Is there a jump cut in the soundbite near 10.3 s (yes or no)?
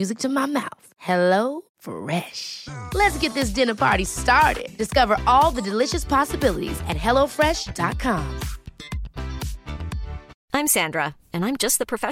yes